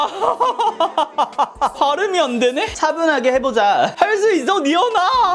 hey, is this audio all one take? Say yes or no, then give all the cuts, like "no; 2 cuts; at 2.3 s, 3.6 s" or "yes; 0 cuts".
no; 2 cuts; at 1.8 s, 2.7 s